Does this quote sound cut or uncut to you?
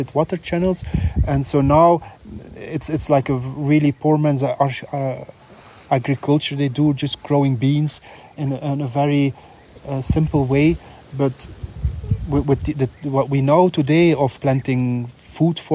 uncut